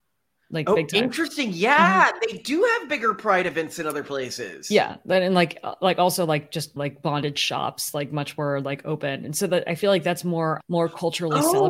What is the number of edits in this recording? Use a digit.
0